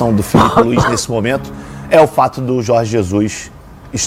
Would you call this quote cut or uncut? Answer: uncut